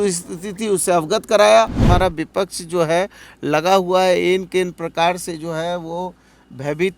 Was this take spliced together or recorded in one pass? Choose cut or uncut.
cut